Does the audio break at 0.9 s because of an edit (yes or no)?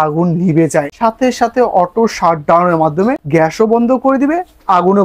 yes